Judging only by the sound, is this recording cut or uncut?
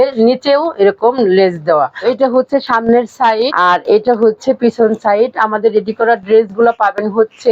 cut